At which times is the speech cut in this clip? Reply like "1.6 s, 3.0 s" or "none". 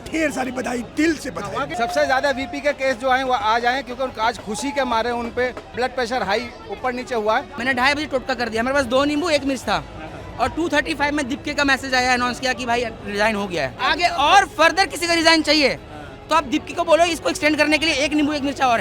1.7 s, 5.7 s, 7.6 s, 13.8 s